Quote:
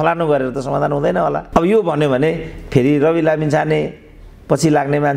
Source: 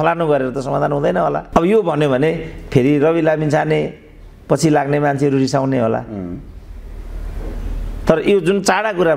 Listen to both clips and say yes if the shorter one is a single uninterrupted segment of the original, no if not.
yes